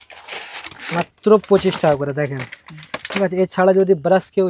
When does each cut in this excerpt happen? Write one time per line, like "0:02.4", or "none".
none